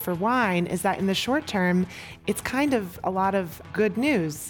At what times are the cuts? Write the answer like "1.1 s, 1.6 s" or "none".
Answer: 3.6 s